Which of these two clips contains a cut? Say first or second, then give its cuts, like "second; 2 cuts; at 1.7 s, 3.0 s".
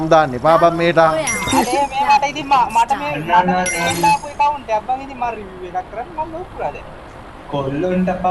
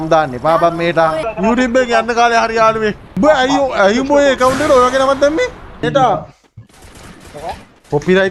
second; 3 cuts; at 1.3 s, 3.0 s, 5.8 s